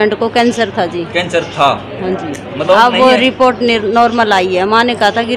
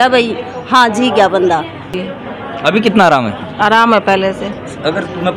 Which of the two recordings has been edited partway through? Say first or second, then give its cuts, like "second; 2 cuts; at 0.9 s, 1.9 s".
second; 1 cut; at 2.0 s